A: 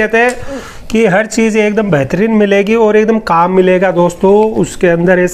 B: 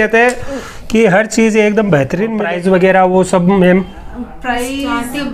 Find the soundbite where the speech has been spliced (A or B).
B